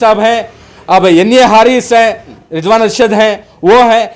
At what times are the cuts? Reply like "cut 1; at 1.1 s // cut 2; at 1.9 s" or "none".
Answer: cut 1; at 2.4 s